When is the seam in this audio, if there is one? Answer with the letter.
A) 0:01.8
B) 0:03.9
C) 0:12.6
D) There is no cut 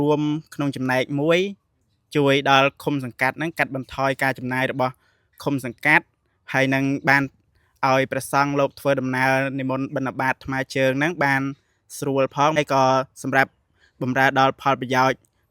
C